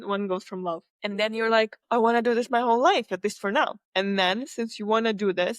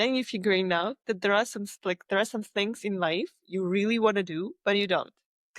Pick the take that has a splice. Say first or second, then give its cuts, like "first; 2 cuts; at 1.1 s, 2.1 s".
first; 3 cuts; at 0.9 s, 1.8 s, 3.8 s